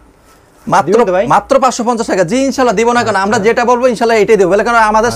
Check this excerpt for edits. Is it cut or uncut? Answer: uncut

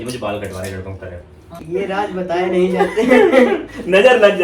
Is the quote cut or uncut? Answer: cut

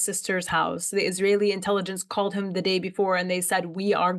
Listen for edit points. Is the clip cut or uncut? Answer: uncut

